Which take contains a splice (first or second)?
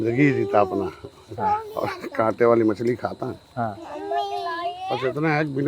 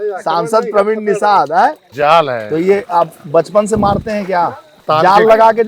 second